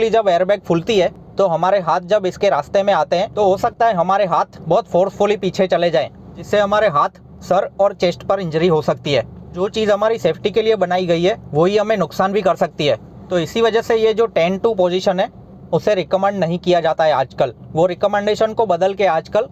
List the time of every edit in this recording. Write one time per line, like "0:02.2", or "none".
none